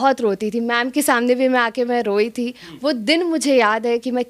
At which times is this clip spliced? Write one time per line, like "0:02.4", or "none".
none